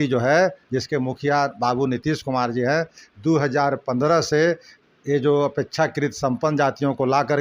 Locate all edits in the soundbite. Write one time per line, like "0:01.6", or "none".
none